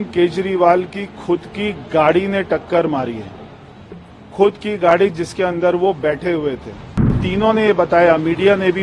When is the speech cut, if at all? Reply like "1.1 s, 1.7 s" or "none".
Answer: 7.3 s

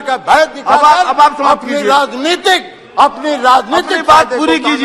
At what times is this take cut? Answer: none

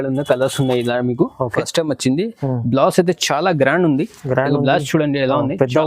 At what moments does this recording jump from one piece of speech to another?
1.6 s

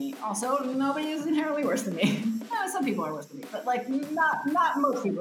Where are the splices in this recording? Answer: none

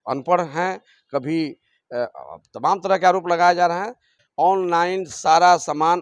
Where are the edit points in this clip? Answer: 4.2 s

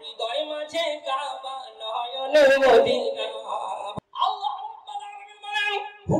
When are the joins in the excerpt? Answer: 3.9 s

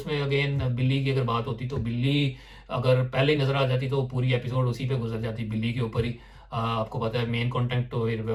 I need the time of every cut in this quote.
none

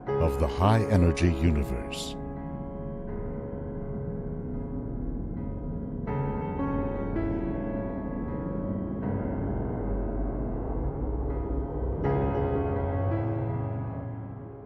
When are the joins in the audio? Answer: 3.6 s

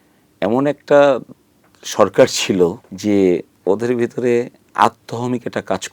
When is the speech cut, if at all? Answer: 2.9 s, 3.5 s

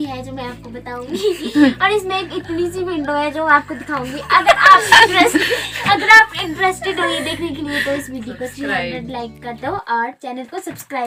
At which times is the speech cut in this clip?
none

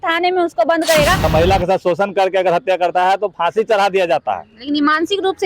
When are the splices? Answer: 1.3 s

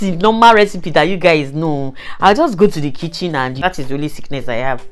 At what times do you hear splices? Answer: 3.6 s

